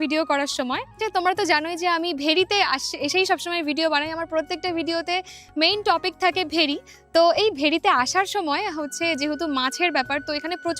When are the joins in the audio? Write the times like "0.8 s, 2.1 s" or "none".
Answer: 1.0 s